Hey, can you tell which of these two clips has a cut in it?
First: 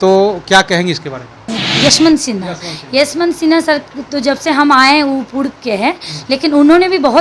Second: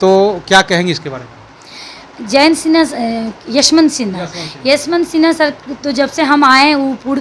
first; 1 cut; at 1.6 s

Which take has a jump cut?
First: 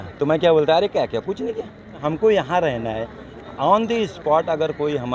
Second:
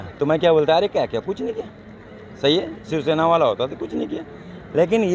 first; 1 cut; at 2.0 s

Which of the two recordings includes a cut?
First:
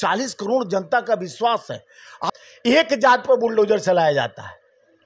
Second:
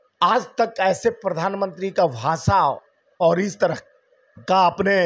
first; 1 cut; at 2.3 s

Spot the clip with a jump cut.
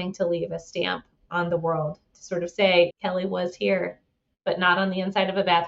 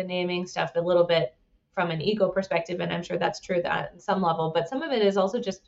first; 1 cut; at 2.9 s

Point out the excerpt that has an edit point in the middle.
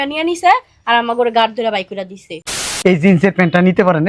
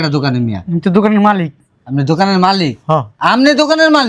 first; 1 cut; at 2.6 s

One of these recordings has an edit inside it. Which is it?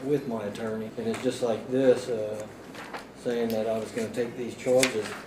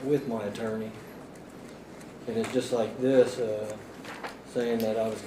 first; 1 cut; at 0.9 s

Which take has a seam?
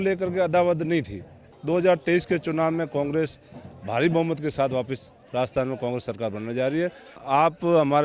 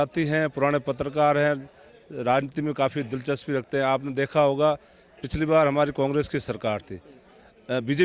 first; 2 cuts; at 1.5 s, 7.2 s

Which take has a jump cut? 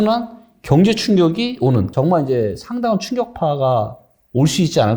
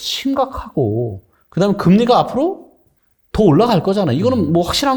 first; 1 cut; at 1.9 s

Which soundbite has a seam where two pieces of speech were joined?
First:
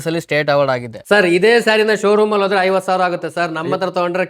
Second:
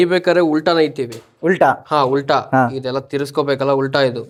first; 1 cut; at 0.9 s

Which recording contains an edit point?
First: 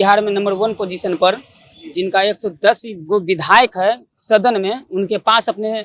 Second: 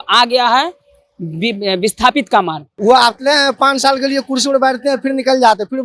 second; 1 cut; at 2.6 s

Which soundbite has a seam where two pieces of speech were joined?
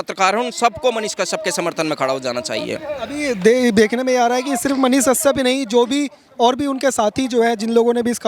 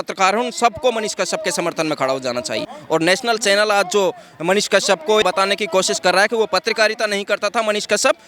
second; 2 cuts; at 2.7 s, 5.2 s

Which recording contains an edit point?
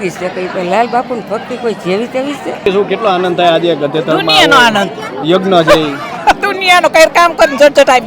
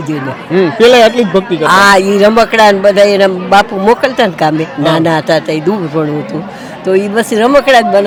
first; 1 cut; at 2.7 s

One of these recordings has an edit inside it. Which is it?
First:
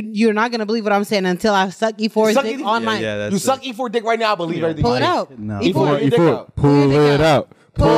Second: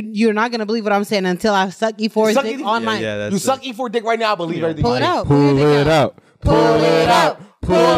second; 1 cut; at 5.2 s

